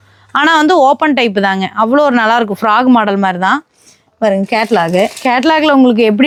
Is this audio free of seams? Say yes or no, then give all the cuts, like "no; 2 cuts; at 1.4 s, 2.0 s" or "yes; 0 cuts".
yes; 0 cuts